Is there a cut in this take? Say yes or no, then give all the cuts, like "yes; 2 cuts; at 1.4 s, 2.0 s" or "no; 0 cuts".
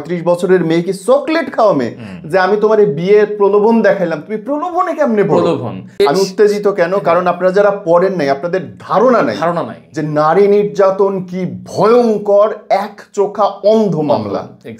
yes; 1 cut; at 5.9 s